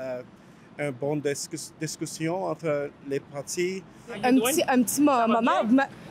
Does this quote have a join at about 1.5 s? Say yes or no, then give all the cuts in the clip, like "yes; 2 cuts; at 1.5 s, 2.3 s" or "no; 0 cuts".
no; 1 cut; at 4.2 s